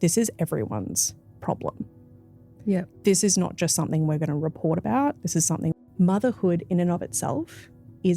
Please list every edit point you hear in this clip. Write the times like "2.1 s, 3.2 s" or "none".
5.7 s